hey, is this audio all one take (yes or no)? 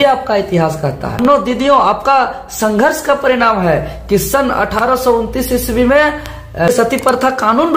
no